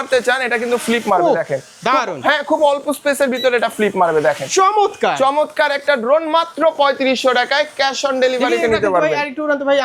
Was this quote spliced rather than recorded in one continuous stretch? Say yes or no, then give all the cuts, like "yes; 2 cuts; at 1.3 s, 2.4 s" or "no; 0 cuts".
no; 0 cuts